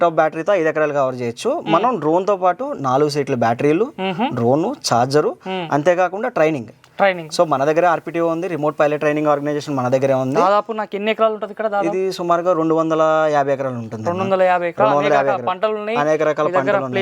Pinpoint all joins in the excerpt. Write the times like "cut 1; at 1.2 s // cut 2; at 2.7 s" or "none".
none